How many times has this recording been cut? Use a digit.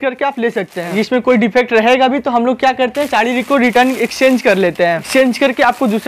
2